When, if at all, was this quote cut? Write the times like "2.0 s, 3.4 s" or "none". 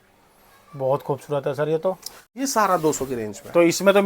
2.4 s